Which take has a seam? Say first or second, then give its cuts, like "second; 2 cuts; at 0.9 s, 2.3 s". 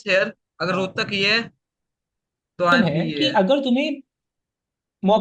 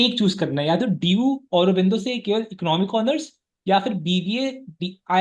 first; 1 cut; at 2.8 s